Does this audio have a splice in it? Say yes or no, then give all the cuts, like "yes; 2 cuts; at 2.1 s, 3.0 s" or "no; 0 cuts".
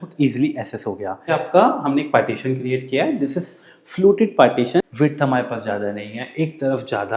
yes; 2 cuts; at 1.3 s, 4.8 s